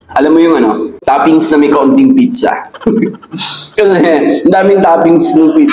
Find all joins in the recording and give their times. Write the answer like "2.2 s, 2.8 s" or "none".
0.9 s

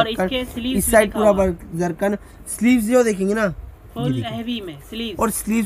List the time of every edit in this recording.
none

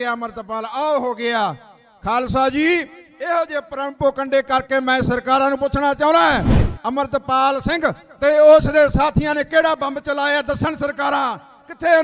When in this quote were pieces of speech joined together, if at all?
none

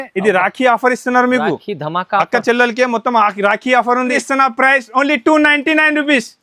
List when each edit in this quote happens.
4.1 s

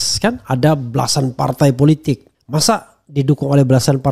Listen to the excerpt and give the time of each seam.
none

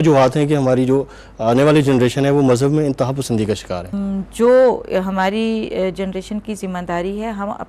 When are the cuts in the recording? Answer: 3.9 s

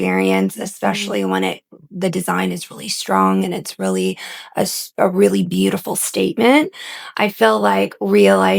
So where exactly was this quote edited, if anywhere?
none

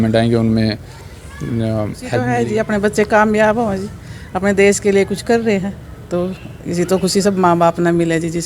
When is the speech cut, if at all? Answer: 2.2 s

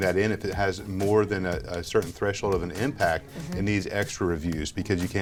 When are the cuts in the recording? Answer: none

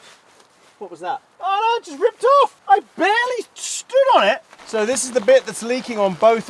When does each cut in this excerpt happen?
1.3 s, 2.6 s, 4.5 s

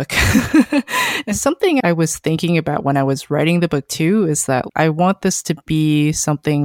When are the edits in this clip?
1.2 s

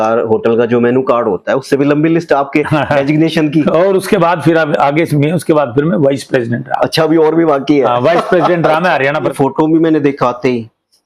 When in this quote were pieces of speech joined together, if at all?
9.3 s

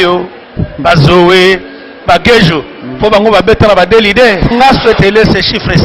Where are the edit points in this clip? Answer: 4.5 s

